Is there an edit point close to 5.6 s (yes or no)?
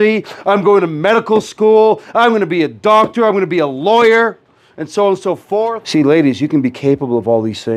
yes